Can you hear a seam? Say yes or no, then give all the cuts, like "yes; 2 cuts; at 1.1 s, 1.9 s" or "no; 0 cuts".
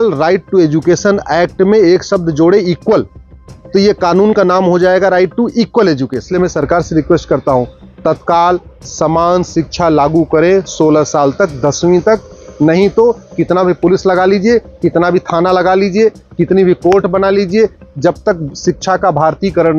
yes; 1 cut; at 6.2 s